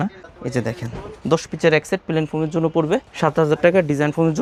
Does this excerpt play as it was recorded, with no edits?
yes; 0 cuts

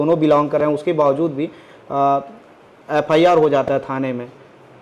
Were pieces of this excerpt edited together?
no; 0 cuts

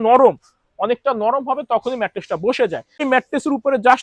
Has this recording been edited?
yes; 1 cut; at 3.0 s

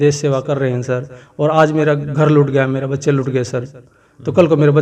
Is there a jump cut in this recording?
no; 0 cuts

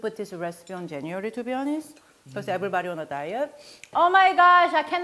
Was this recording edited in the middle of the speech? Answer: yes; 1 cut; at 3.9 s

